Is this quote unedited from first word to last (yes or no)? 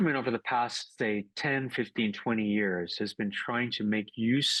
yes